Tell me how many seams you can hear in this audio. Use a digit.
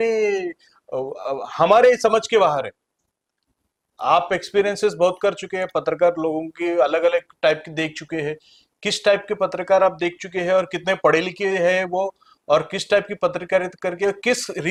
0